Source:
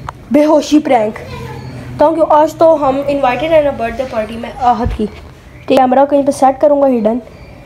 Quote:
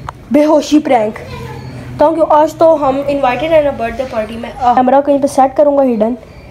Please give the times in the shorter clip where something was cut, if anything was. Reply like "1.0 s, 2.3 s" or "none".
4.8 s